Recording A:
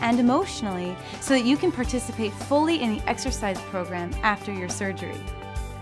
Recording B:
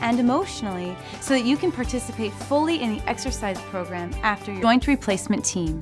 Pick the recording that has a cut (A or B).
A